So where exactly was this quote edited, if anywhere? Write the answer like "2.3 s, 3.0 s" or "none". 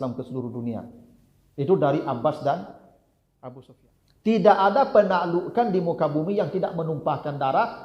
3.7 s